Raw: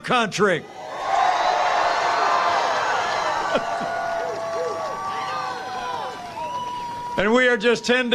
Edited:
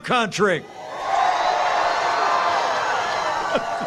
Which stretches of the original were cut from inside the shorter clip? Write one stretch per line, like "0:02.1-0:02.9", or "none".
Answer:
none